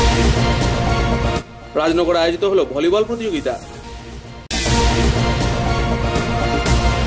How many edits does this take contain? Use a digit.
1